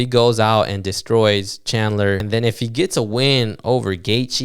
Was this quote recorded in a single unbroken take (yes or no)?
no